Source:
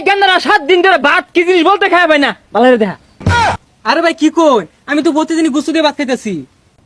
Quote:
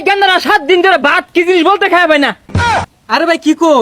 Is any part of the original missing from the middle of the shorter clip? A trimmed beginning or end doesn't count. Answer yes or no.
yes